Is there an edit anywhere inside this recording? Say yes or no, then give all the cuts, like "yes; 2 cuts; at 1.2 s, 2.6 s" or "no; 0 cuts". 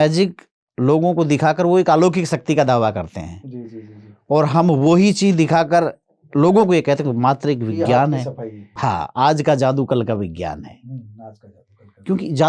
yes; 1 cut; at 8.7 s